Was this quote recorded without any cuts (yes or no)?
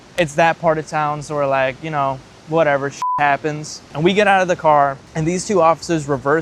yes